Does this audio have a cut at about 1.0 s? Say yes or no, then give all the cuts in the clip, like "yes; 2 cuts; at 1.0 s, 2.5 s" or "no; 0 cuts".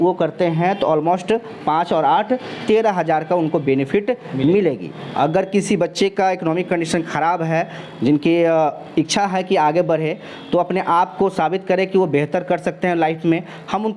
no; 1 cut; at 5.1 s